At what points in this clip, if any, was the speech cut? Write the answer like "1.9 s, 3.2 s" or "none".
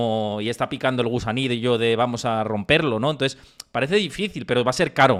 none